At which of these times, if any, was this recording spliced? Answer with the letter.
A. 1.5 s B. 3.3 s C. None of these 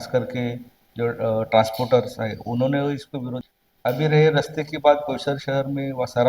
B